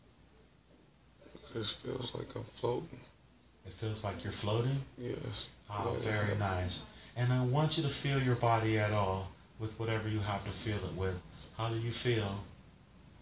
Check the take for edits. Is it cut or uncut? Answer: cut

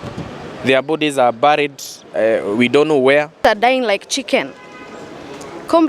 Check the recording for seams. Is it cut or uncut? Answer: cut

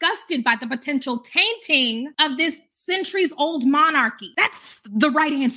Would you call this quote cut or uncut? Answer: cut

